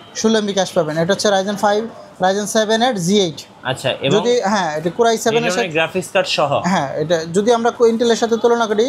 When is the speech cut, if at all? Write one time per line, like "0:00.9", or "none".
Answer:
none